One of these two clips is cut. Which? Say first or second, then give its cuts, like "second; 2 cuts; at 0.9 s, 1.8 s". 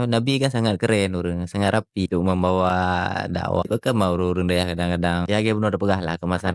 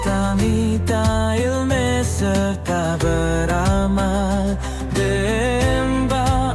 first; 3 cuts; at 2.1 s, 3.7 s, 5.2 s